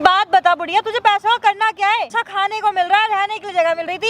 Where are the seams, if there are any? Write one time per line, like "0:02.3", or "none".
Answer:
0:02.2